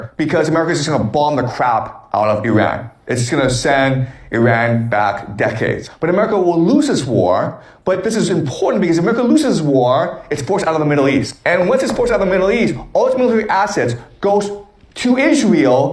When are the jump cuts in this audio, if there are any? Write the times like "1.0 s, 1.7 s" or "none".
none